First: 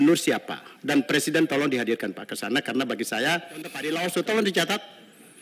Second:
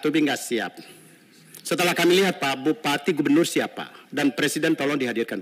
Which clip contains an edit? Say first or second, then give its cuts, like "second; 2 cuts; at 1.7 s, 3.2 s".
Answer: first; 1 cut; at 3.8 s